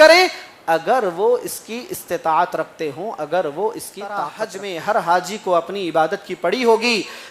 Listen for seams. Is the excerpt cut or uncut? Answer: cut